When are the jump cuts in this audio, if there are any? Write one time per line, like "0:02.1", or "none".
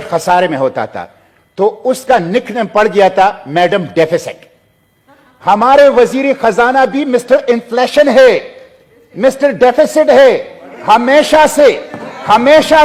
none